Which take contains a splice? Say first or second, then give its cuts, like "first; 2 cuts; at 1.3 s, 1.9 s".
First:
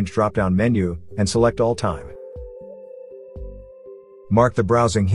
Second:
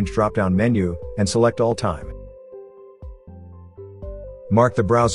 first; 2 cuts; at 1.7 s, 4.3 s